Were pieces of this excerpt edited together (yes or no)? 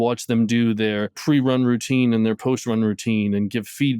yes